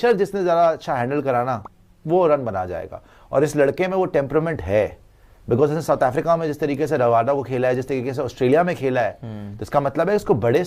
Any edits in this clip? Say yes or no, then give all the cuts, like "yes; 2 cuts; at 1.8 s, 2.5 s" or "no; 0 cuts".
no; 0 cuts